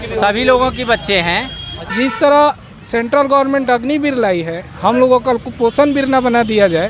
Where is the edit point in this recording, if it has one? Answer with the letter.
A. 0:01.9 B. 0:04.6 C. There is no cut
A